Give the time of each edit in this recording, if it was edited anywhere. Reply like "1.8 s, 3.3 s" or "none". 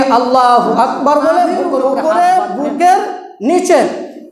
1.7 s